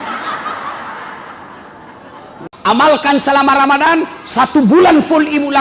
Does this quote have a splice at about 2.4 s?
yes; 1 cut; at 2.4 s

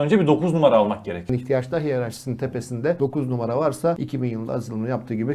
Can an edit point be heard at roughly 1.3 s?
yes; 3 cuts; at 1.3 s, 3.0 s, 4.0 s

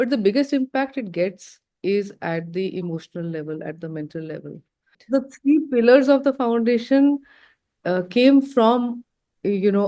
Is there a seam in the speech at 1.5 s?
no; 1 cut; at 5.0 s

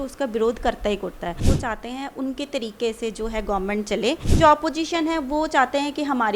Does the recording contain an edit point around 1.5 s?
yes; 2 cuts; at 1.5 s, 4.3 s

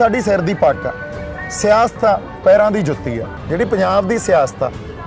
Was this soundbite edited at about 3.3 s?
yes; 1 cut; at 3.3 s

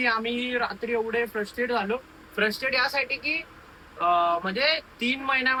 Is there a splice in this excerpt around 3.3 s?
no; 0 cuts

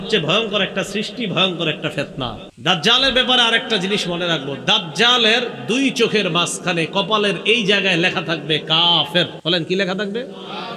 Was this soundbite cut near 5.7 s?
no; 2 cuts; at 2.5 s, 9.4 s

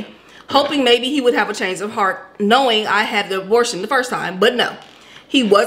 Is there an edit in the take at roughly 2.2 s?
no; 0 cuts

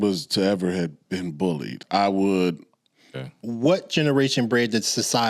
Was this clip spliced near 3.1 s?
yes; 2 cuts; at 1.7 s, 3.1 s

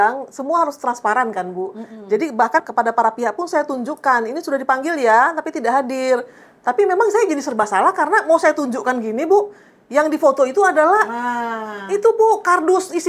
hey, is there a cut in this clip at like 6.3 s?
no; 1 cut; at 2.7 s

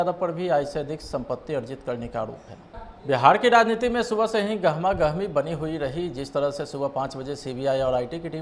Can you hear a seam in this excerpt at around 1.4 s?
no; 1 cut; at 2.9 s

